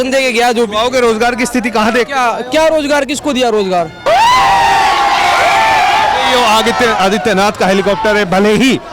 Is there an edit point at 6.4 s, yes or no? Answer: no